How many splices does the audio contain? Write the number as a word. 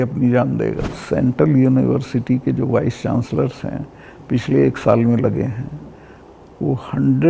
one